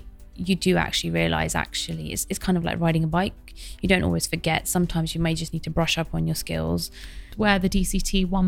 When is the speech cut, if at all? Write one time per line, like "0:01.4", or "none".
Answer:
0:07.3